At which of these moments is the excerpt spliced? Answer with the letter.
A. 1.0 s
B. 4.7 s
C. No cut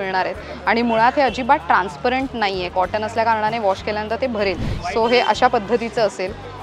B